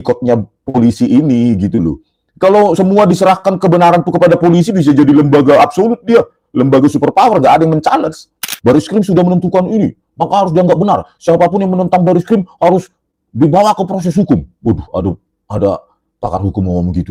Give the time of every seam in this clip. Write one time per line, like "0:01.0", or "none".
0:08.5